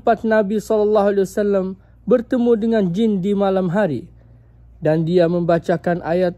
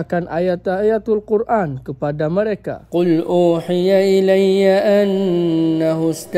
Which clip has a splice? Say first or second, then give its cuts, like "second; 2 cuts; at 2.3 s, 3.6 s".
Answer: second; 1 cut; at 2.8 s